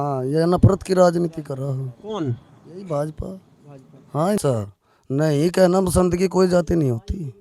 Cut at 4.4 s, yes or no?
yes